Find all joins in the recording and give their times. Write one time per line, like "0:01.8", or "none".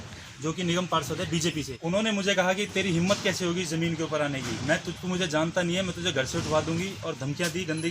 0:01.7

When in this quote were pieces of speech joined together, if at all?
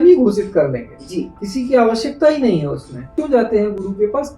0:03.2

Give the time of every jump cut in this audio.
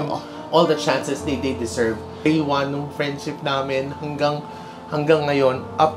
0:02.2

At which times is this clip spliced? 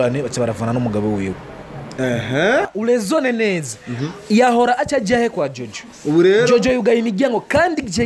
0:02.7

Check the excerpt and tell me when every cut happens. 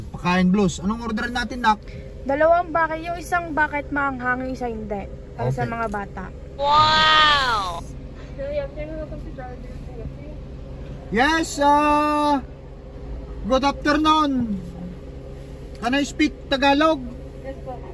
none

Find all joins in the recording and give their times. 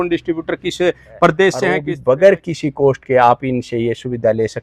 0:01.9

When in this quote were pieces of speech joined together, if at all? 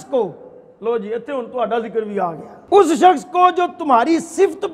0:02.5

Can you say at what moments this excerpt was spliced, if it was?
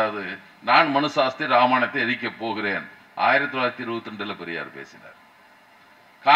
none

